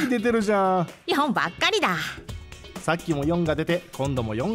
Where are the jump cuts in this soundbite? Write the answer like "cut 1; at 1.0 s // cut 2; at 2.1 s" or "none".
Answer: cut 1; at 2.6 s